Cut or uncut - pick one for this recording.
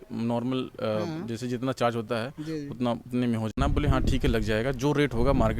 cut